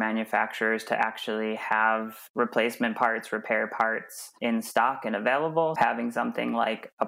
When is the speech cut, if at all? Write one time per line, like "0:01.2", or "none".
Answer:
0:05.7